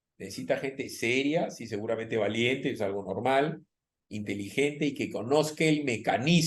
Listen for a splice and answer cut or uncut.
uncut